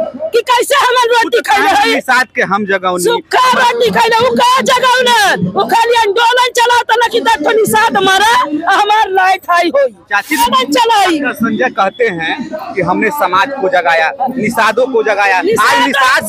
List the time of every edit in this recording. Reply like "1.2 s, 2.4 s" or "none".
10.4 s